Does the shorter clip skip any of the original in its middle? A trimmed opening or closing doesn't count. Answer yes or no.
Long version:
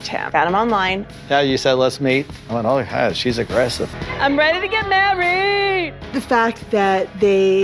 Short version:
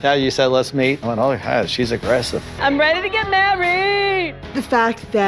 yes